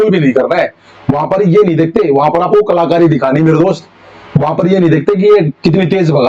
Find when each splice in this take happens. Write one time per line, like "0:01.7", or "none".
none

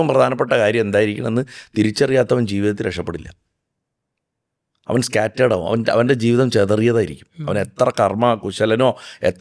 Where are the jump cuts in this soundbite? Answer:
none

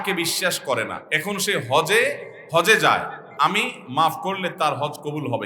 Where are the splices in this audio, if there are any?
0:01.0
0:02.3
0:03.2

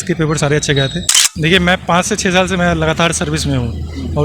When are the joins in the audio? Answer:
0:01.0

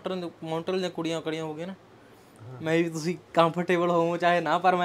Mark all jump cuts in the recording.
none

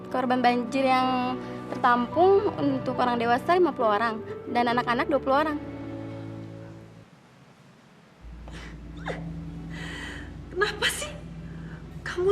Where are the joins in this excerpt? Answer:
0:05.7

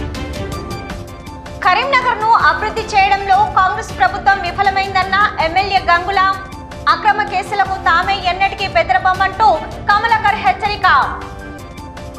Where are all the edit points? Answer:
0:00.9

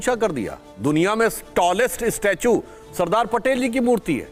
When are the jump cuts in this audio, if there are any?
none

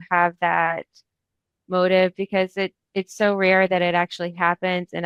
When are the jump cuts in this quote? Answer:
none

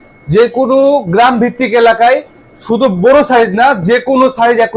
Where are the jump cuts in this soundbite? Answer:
none

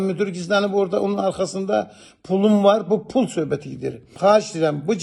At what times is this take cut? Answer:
0:04.1

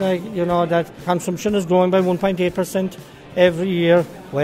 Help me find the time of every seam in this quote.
0:01.0

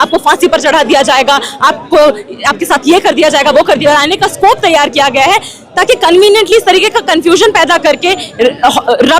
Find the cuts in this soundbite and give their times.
0:03.8

